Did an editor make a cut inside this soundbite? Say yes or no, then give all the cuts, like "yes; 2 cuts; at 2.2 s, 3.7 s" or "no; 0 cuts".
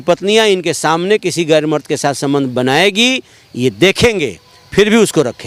no; 0 cuts